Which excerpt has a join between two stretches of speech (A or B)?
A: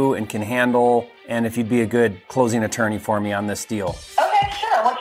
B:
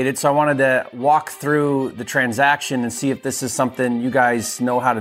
A